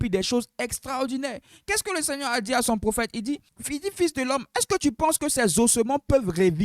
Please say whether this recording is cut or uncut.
cut